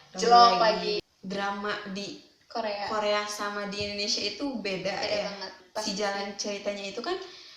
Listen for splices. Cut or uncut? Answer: cut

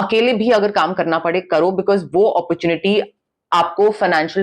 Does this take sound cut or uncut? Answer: uncut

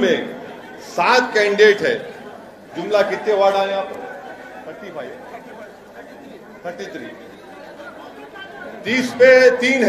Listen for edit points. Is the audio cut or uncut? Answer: cut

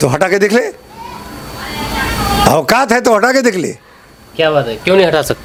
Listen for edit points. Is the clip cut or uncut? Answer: uncut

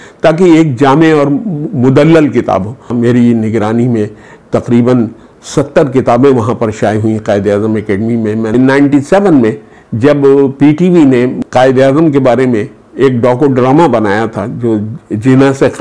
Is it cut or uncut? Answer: cut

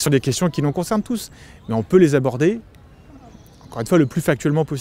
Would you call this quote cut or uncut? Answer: uncut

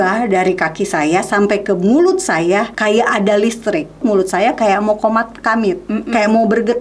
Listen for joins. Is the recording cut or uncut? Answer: cut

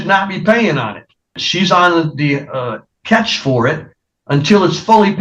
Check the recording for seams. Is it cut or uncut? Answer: cut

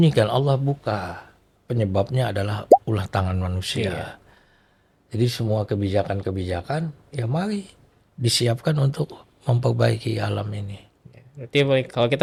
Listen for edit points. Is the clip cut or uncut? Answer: uncut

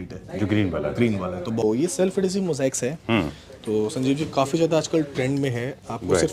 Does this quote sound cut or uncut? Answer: cut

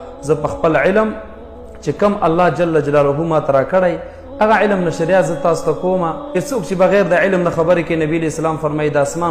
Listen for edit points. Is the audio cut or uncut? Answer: cut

